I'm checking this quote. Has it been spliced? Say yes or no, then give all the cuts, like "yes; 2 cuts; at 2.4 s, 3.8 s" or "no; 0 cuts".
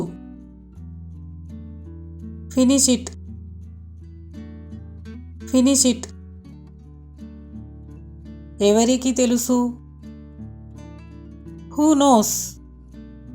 yes; 5 cuts; at 3.1 s, 4.8 s, 6.1 s, 7.9 s, 12.2 s